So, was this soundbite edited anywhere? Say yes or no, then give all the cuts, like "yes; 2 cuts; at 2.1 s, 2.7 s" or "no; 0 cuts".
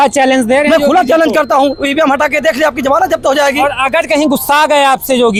no; 0 cuts